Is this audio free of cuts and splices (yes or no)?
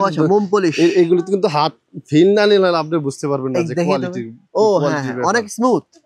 yes